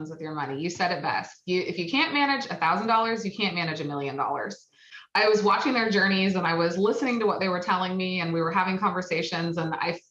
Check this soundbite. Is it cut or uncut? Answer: cut